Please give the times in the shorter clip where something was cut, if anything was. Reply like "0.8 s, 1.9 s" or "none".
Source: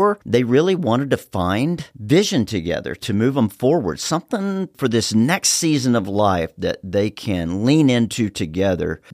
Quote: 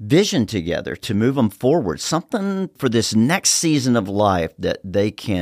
none